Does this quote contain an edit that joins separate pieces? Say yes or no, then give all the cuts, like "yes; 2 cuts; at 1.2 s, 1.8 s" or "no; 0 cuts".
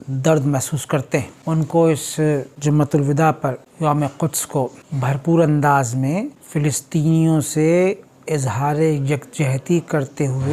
no; 0 cuts